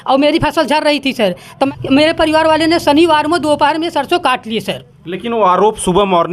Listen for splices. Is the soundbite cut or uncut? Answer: cut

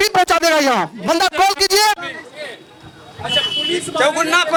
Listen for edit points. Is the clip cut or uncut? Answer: uncut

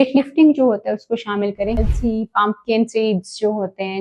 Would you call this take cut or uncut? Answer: cut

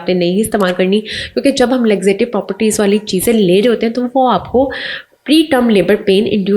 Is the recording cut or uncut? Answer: uncut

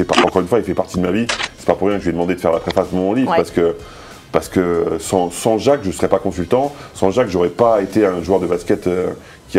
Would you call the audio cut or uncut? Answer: uncut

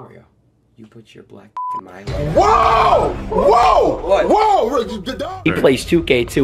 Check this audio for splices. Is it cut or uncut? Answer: cut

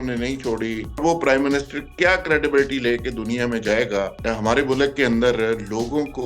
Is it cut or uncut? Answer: cut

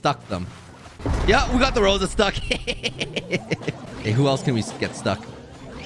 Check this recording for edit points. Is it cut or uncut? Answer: cut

